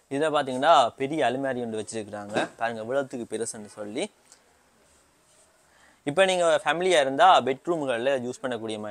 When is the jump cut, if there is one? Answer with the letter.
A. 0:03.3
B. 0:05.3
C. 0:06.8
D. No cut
D